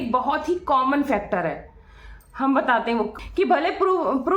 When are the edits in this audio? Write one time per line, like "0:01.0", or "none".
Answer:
0:03.1